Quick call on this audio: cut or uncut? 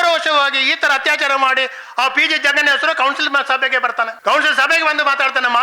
cut